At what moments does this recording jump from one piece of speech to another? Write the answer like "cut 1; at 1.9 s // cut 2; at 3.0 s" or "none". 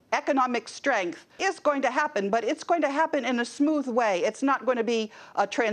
cut 1; at 1.3 s